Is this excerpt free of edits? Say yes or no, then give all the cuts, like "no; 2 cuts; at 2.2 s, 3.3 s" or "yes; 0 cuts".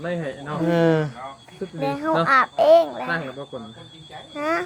yes; 0 cuts